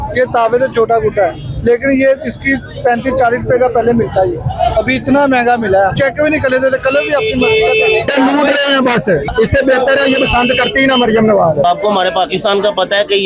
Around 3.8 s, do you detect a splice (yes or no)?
no